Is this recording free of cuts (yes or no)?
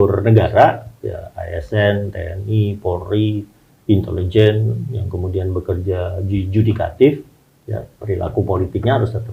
yes